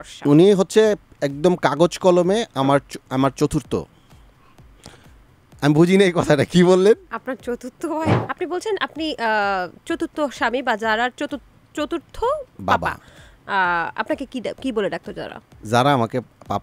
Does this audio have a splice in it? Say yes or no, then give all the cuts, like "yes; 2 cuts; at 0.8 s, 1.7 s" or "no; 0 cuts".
yes; 1 cut; at 8.2 s